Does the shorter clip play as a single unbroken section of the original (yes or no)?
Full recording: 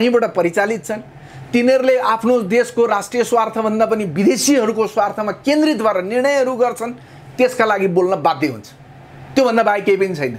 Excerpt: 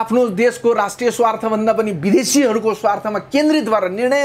yes